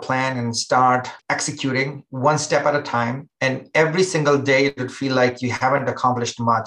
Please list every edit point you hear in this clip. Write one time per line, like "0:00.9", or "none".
0:01.2
0:03.2

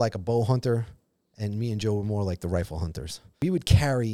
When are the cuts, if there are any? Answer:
0:03.2

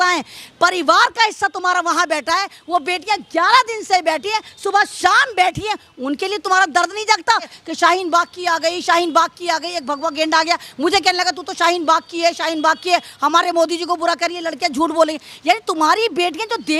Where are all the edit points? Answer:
0:07.6

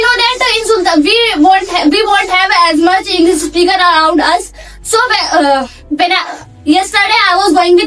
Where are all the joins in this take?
none

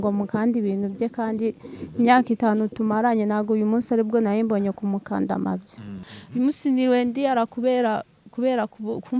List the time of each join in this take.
0:06.2

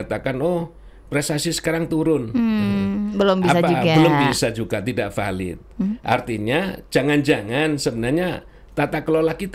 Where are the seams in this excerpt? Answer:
none

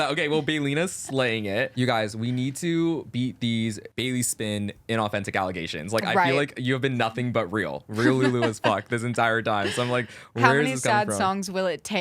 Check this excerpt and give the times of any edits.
0:01.7
0:03.9

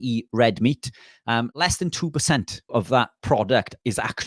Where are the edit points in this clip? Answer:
0:02.9

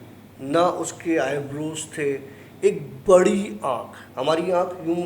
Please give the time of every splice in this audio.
0:04.0

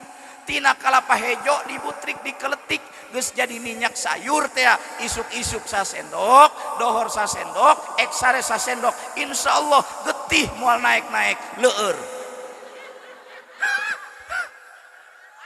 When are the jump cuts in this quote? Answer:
none

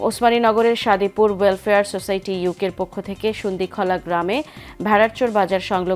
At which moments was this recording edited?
none

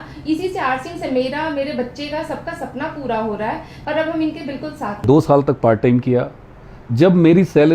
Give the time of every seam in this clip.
0:04.9

